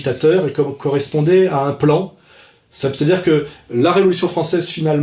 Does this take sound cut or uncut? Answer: uncut